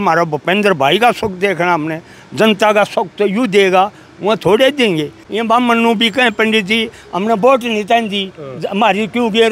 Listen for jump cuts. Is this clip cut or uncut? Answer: cut